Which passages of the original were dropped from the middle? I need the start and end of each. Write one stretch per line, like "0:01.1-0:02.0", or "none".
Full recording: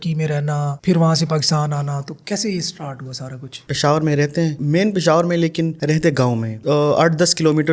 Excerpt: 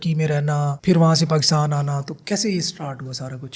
none